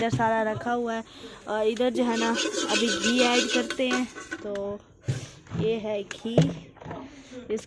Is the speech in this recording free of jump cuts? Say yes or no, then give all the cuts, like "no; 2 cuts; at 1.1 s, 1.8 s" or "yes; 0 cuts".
yes; 0 cuts